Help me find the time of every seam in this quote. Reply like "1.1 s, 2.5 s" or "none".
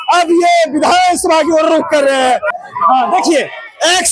2.6 s